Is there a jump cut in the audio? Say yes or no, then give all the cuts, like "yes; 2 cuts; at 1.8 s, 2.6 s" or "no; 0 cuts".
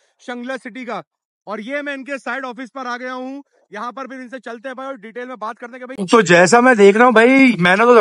yes; 1 cut; at 5.9 s